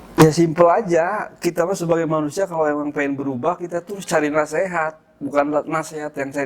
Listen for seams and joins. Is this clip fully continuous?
yes; 0 cuts

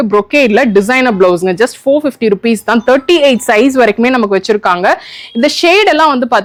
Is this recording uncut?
yes; 0 cuts

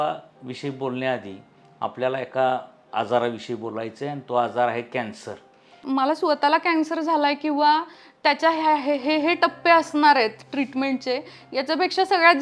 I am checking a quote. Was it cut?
yes; 1 cut; at 5.8 s

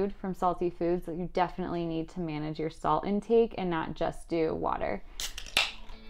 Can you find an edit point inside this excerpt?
no; 0 cuts

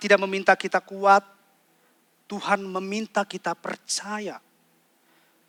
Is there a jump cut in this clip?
no; 0 cuts

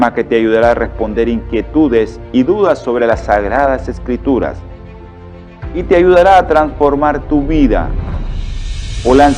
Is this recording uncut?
yes; 0 cuts

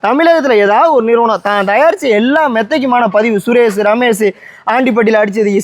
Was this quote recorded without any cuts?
yes; 0 cuts

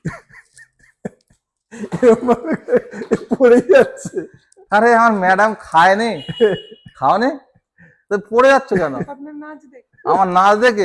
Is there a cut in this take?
no; 0 cuts

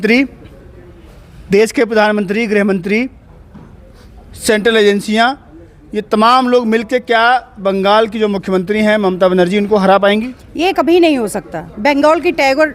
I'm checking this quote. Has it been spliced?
no; 0 cuts

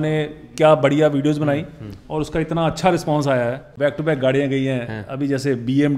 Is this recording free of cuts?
no; 1 cut; at 3.8 s

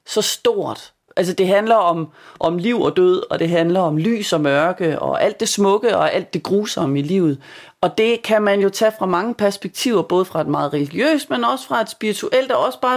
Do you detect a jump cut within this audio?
yes; 2 cuts; at 1.0 s, 2.3 s

